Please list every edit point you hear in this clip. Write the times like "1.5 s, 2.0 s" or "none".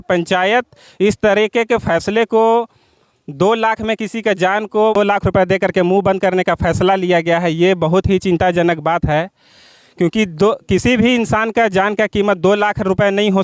none